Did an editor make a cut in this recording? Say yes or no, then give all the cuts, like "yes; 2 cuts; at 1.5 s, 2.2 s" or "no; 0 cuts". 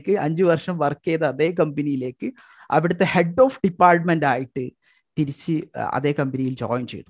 no; 0 cuts